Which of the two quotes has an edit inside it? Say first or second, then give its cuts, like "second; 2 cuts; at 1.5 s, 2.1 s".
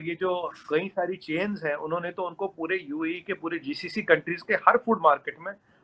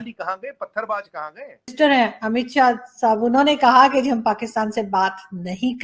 second; 1 cut; at 1.7 s